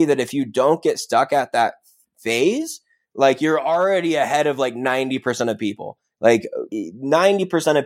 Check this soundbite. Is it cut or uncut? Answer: cut